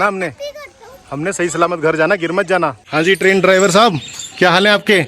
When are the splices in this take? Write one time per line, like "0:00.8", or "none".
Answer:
0:02.8

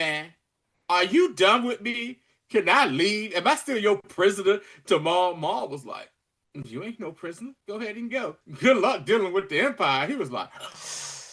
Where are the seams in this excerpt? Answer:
0:07.6
0:08.4

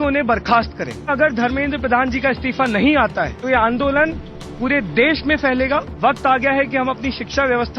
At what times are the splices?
0:01.1
0:03.4
0:05.9

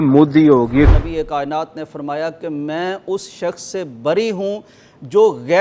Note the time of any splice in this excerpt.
0:00.9

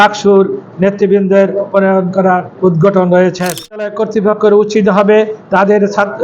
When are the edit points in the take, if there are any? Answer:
0:03.9

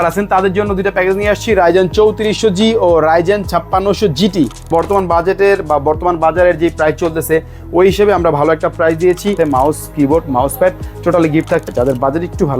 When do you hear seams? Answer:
0:04.7
0:09.4
0:11.6

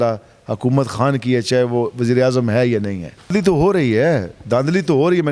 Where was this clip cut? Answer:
0:03.3

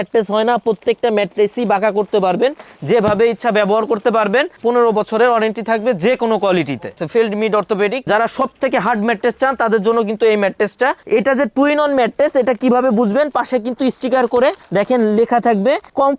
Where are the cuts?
0:07.0
0:08.0
0:11.0

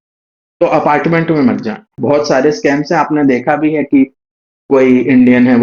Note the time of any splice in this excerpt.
0:02.0

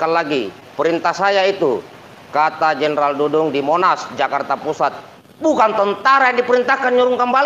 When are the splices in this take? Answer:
0:05.1

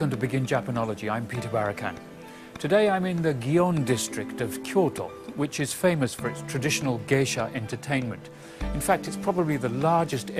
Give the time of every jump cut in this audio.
0:05.0

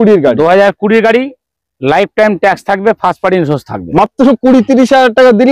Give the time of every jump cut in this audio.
0:03.8

